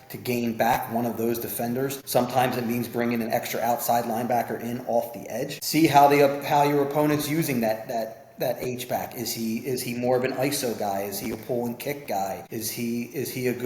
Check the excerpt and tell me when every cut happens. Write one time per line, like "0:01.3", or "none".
0:02.0
0:05.6
0:12.4